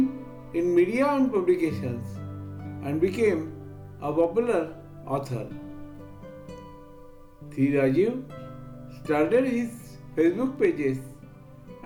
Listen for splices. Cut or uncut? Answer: uncut